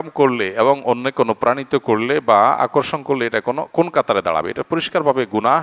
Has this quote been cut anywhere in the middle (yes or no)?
no